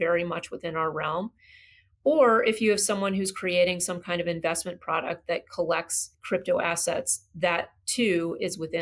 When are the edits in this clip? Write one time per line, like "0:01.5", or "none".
0:06.1